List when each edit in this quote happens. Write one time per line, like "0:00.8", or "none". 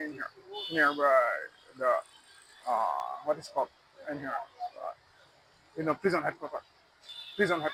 none

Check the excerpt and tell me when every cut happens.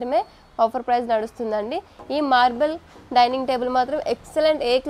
none

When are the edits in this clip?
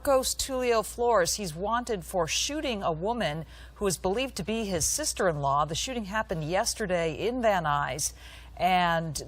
none

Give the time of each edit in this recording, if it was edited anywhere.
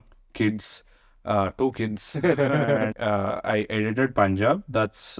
0:02.9

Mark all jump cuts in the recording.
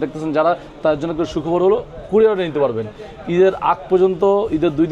none

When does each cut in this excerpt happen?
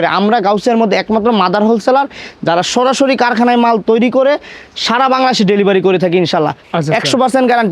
0:06.6

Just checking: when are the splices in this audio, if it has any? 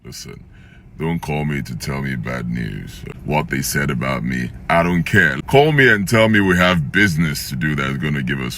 0:03.1
0:05.3

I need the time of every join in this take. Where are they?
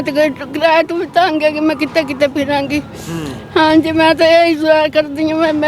none

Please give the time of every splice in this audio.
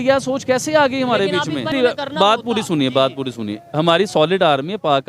0:01.7

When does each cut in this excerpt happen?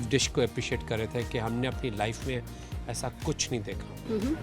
none

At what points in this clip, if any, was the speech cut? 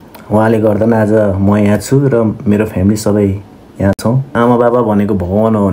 0:04.3

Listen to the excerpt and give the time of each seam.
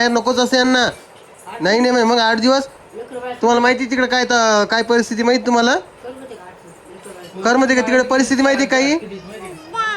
none

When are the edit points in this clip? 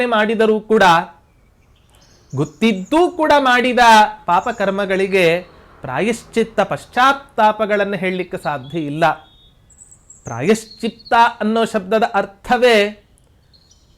none

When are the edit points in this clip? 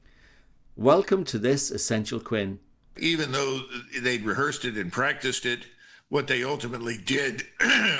0:03.0

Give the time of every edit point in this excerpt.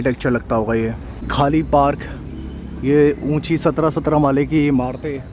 none

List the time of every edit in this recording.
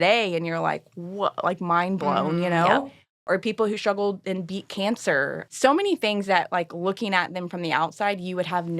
0:05.4

